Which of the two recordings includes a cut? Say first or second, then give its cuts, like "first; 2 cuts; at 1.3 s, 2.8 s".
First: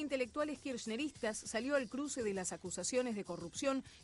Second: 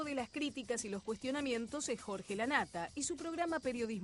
first; 1 cut; at 1.8 s